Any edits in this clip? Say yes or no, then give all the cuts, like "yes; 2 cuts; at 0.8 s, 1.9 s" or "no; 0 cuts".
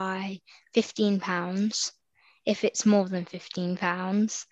no; 0 cuts